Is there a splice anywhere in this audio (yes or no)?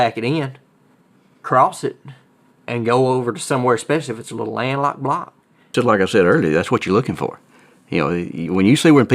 yes